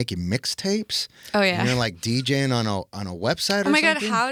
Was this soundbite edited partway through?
no; 0 cuts

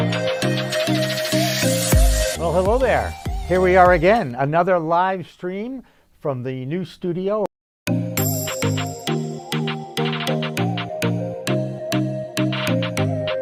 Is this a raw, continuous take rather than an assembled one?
yes; 0 cuts

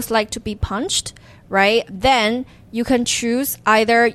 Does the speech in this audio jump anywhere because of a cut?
yes; 1 cut; at 1.9 s

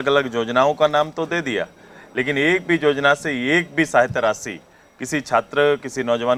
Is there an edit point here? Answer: no; 0 cuts

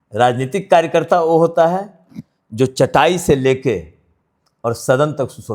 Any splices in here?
no; 0 cuts

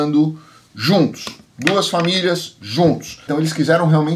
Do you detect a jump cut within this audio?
yes; 1 cut; at 3.2 s

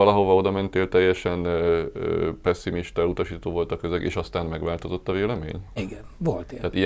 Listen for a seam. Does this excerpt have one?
yes; 1 cut; at 5.8 s

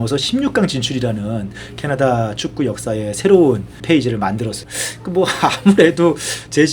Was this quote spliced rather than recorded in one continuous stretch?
yes; 1 cut; at 3.8 s

